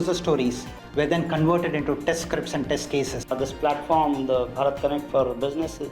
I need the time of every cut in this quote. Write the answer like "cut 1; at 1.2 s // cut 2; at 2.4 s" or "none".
cut 1; at 3.3 s